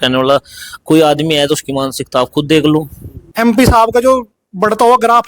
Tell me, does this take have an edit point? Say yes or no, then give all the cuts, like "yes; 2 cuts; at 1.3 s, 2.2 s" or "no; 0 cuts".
yes; 1 cut; at 3.3 s